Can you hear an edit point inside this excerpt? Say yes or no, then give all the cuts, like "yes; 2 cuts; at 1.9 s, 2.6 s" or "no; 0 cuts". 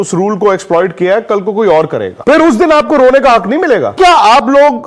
yes; 2 cuts; at 2.1 s, 3.9 s